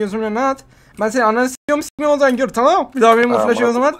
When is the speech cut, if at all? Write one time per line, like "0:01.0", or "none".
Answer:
0:02.9